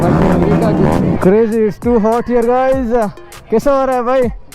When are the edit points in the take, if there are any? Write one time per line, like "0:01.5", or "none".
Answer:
0:01.2